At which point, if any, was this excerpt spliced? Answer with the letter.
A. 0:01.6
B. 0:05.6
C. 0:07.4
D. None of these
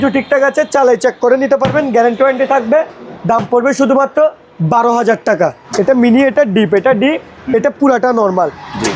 B